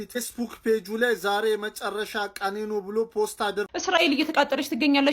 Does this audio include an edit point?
yes; 1 cut; at 3.7 s

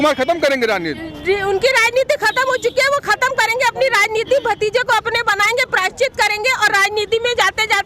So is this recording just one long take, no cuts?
yes; 0 cuts

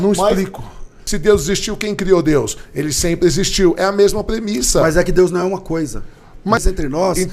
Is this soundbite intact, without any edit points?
no; 2 cuts; at 1.0 s, 6.6 s

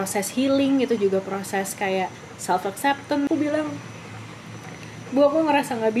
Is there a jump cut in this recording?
yes; 1 cut; at 3.3 s

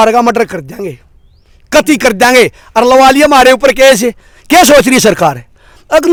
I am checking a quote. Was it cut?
no; 0 cuts

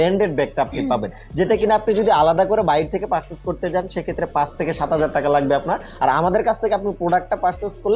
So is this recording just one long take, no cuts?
yes; 0 cuts

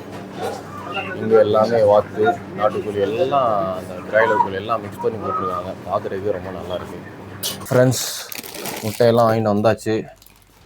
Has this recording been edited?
yes; 1 cut; at 7.5 s

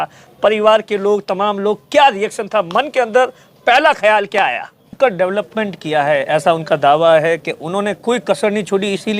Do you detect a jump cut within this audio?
yes; 1 cut; at 4.9 s

